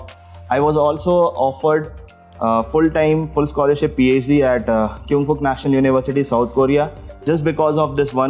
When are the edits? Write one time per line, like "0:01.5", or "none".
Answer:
none

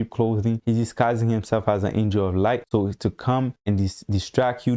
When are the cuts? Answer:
0:03.6

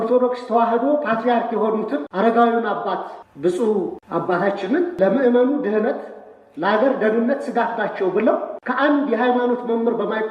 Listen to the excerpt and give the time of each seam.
0:02.1
0:03.2
0:04.0
0:05.0
0:08.6

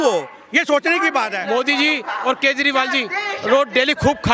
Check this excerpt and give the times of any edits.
0:01.4

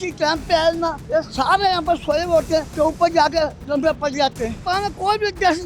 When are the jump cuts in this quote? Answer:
0:01.0
0:02.7
0:04.6

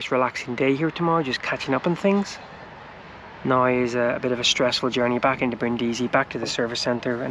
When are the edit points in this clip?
none

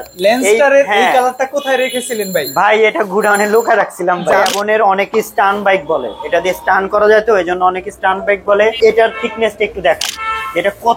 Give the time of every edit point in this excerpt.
0:04.4
0:08.8

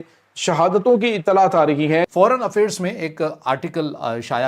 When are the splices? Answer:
0:02.1

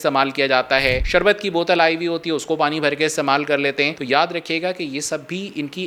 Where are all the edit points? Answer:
none

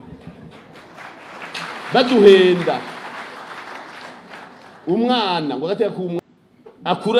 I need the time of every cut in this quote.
0:06.2

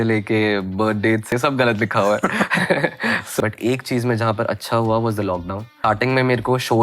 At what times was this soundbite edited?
0:01.3
0:03.4
0:05.8

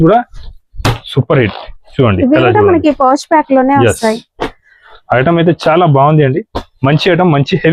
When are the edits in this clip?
none

